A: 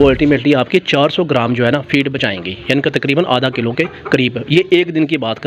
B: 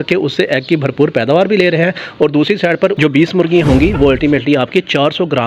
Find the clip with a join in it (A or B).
B